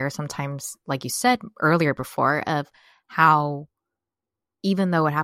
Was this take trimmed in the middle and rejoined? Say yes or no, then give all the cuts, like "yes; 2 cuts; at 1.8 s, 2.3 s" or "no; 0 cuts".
no; 0 cuts